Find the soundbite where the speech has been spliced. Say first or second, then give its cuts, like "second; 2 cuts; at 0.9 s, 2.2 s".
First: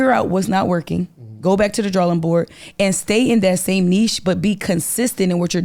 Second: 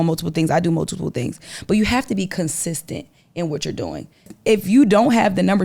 second; 1 cut; at 4.3 s